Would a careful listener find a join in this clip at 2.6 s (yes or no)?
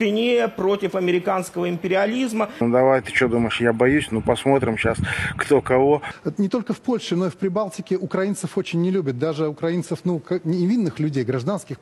yes